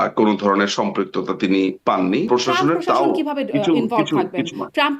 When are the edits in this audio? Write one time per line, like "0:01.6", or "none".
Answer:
0:02.3

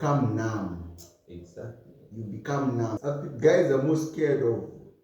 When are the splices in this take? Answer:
0:03.0

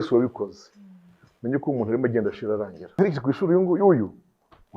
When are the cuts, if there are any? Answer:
0:03.0

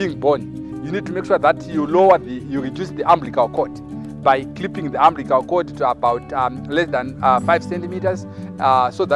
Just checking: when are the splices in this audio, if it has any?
none

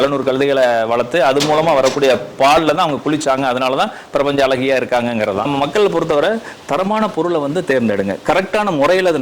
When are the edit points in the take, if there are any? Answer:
0:05.5

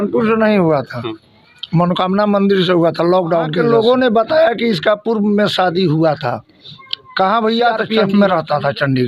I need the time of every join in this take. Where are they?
0:03.5
0:07.8

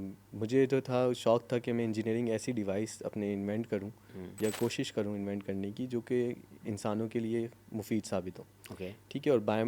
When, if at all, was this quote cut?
none

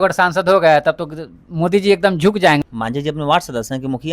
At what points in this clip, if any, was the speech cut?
0:02.6

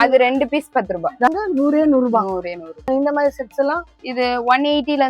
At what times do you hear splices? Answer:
0:01.3
0:02.9

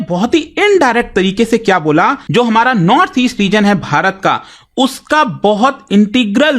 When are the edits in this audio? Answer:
0:02.2

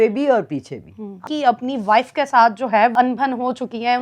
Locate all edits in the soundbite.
0:01.2
0:02.9

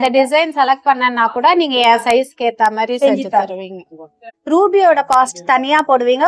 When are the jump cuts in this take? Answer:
0:04.3

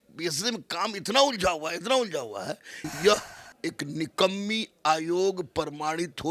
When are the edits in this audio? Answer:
0:02.9

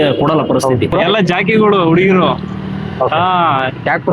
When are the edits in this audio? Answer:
0:00.9
0:02.4

